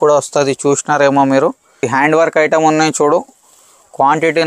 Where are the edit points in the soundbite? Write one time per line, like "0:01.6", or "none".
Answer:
0:01.9